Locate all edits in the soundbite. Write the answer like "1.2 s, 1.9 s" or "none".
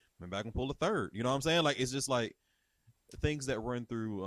none